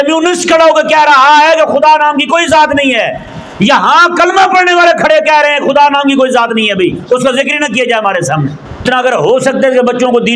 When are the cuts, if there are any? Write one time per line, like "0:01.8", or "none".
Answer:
0:08.8

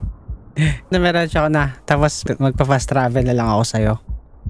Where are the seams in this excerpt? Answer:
0:00.9
0:02.2

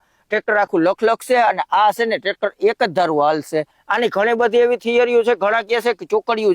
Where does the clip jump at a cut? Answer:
0:03.8

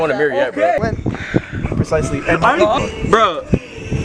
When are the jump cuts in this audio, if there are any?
none

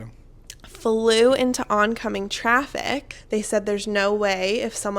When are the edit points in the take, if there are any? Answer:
0:03.1

